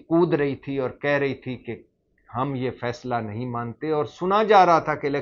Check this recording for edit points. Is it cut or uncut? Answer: uncut